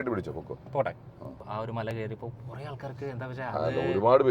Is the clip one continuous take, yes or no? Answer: no